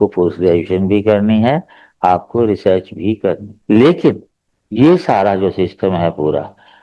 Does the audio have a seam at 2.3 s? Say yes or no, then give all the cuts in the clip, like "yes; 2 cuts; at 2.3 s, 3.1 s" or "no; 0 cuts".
no; 1 cut; at 3.5 s